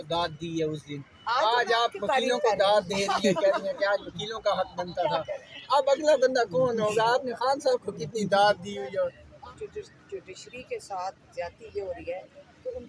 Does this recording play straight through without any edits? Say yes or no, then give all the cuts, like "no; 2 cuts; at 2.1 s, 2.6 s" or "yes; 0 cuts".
no; 1 cut; at 9.2 s